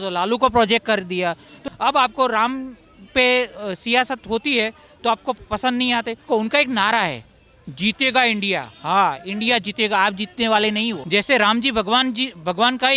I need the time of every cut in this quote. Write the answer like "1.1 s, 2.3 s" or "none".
1.5 s, 6.3 s, 11.0 s